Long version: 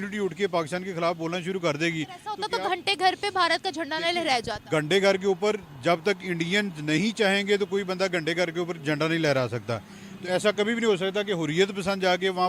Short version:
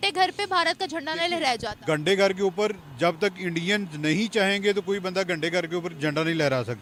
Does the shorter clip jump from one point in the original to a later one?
no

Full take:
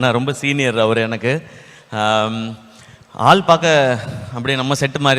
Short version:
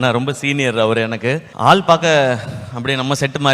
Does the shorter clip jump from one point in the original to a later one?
yes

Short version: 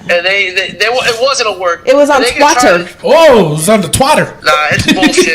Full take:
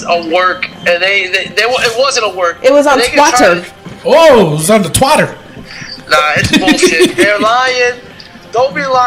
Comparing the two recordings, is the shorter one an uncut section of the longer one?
no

